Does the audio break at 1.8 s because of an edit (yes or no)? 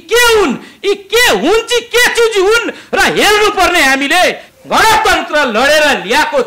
no